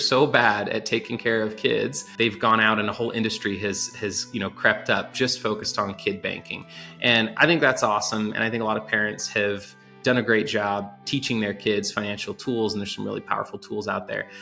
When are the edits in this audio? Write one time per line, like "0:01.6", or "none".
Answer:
0:02.0